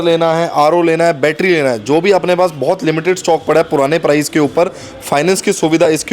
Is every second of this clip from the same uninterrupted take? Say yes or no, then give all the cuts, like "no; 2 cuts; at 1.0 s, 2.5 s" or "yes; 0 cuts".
yes; 0 cuts